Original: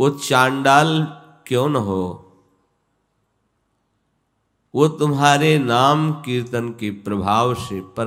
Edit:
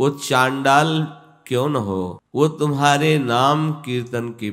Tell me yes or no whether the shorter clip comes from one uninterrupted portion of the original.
no